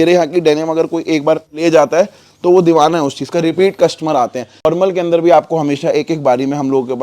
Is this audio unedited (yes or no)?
no